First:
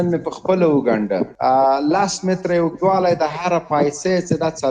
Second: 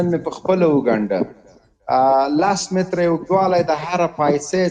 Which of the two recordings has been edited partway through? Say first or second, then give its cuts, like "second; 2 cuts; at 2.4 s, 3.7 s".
first; 1 cut; at 1.3 s